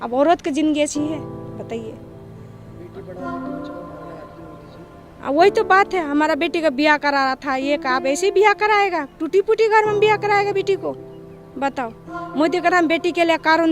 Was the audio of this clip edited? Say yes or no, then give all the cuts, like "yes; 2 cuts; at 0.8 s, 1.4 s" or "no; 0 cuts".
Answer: no; 0 cuts